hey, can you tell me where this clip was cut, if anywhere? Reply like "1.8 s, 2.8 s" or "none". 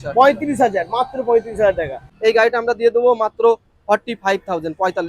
2.0 s

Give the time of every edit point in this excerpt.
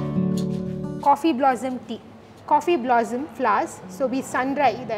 2.3 s

